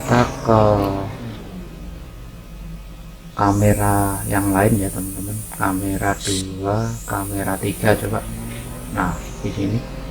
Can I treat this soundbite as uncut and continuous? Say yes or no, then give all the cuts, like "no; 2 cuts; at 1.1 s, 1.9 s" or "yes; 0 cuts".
yes; 0 cuts